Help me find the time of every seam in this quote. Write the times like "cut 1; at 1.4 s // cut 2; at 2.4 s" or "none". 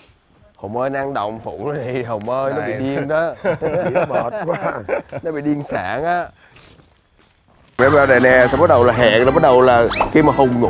cut 1; at 7.8 s